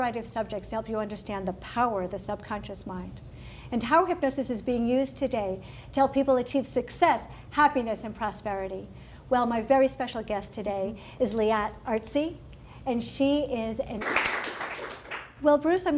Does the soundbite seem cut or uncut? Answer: uncut